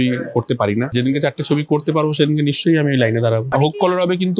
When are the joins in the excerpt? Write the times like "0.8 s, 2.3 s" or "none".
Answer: 0.9 s, 3.5 s